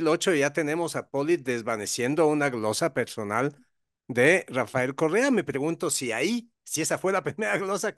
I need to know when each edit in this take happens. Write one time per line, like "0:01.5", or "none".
none